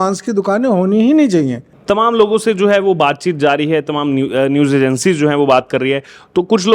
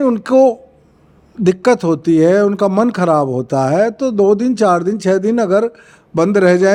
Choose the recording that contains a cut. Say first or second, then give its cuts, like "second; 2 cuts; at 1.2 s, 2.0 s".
first; 1 cut; at 1.7 s